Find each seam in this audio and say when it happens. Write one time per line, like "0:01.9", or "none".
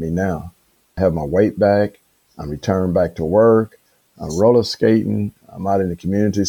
0:00.9